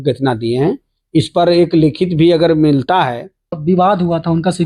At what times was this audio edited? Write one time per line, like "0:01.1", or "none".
0:03.6